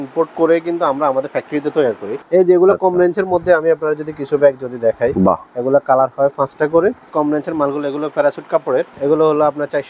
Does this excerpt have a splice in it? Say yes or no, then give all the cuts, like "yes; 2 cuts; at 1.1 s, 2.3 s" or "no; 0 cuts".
yes; 3 cuts; at 2.1 s, 7.1 s, 8.9 s